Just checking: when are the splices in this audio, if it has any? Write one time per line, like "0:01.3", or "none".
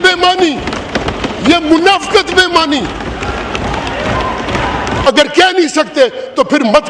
0:05.0

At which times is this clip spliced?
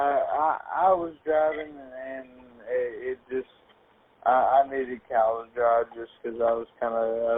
none

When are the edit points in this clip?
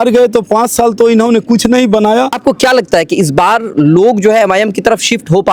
0:02.4

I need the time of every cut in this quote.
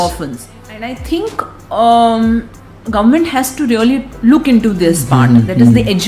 0:01.0

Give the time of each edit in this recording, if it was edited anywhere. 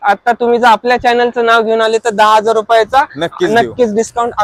none

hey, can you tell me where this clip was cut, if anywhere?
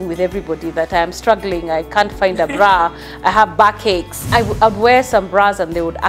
0:04.2

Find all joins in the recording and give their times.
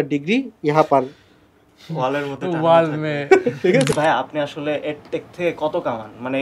0:03.9

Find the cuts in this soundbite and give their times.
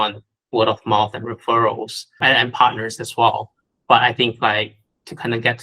0:02.1

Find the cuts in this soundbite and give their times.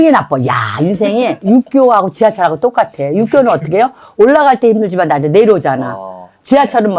0:01.4

